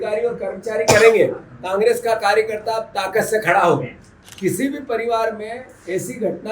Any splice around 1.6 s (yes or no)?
no